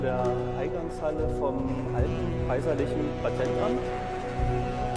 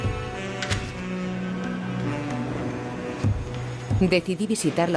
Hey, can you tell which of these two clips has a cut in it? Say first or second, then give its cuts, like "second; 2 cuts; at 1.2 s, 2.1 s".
first; 1 cut; at 2.3 s